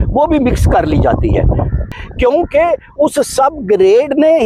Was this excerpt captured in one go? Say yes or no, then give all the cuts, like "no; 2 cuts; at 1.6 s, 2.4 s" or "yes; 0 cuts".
no; 1 cut; at 1.8 s